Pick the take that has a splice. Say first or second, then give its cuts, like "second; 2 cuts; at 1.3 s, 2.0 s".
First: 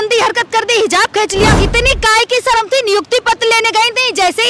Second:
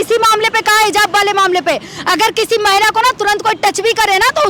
first; 1 cut; at 1.5 s